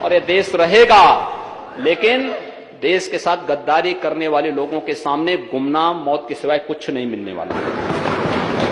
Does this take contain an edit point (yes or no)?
no